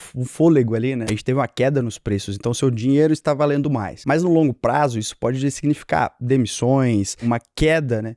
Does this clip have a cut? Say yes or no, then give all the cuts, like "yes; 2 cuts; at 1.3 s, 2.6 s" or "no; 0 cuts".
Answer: yes; 2 cuts; at 1.1 s, 7.2 s